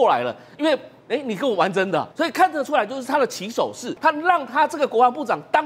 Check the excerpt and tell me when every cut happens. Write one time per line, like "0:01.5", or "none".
0:03.9